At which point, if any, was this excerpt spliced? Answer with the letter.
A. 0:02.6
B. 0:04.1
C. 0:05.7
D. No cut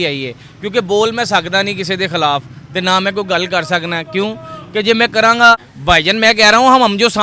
C